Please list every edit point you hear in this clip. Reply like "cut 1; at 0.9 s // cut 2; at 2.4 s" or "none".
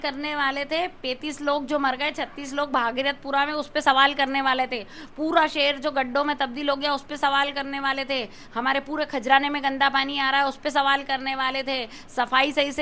none